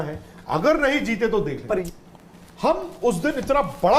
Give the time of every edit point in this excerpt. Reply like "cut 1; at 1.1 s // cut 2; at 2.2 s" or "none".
cut 1; at 1.9 s